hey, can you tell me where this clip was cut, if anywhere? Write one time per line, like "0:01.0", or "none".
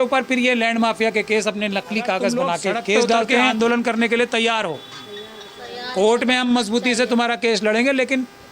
0:03.5